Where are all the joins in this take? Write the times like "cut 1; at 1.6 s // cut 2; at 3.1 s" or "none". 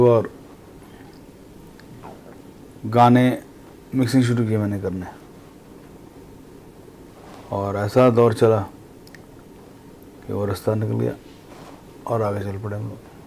none